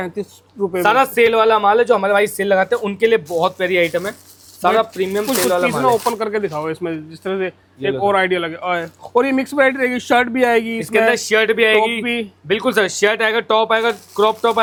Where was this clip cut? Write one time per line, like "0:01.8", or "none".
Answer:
none